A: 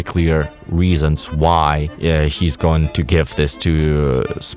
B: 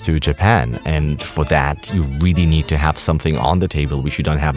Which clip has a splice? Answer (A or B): A